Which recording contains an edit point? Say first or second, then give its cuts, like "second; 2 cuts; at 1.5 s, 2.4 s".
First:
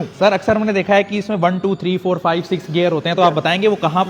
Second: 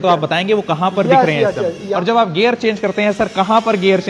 second; 1 cut; at 1.9 s